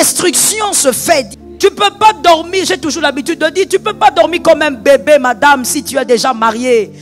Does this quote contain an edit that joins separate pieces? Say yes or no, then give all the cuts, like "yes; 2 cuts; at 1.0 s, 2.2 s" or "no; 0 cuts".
yes; 1 cut; at 1.3 s